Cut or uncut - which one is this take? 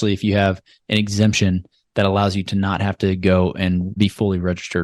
uncut